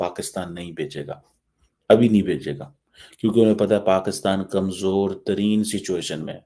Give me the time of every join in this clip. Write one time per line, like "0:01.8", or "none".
none